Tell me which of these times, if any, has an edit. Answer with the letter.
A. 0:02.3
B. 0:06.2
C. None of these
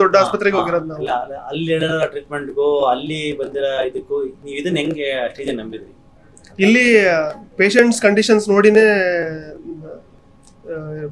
C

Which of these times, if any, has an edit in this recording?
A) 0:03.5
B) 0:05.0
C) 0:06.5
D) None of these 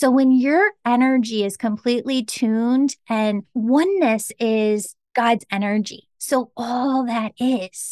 A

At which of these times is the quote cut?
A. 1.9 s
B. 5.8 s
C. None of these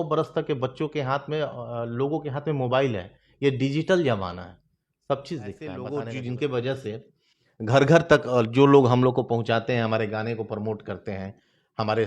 B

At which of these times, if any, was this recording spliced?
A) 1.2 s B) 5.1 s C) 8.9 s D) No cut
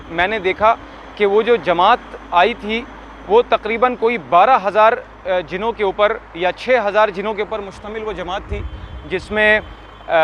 D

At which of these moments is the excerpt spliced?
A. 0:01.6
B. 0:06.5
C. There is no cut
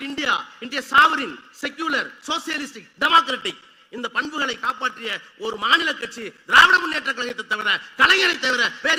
C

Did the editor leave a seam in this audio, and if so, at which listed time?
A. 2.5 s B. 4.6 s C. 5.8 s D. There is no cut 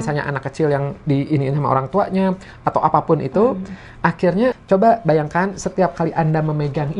B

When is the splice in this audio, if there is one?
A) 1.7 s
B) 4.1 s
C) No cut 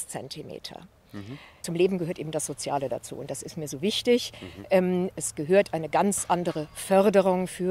A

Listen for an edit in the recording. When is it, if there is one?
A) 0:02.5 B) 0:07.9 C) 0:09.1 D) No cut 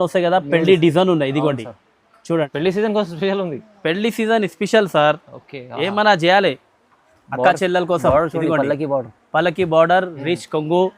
A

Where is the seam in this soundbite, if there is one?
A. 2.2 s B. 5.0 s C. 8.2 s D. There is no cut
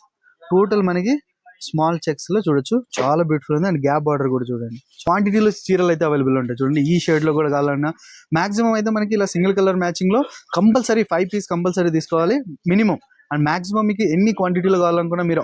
B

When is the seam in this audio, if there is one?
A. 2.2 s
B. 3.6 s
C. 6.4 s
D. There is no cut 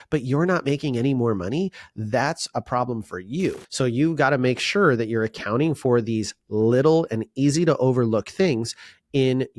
B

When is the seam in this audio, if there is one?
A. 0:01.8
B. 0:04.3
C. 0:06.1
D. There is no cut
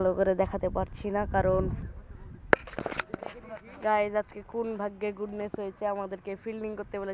A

